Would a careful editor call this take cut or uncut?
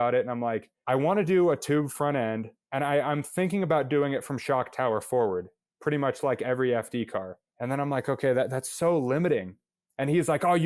uncut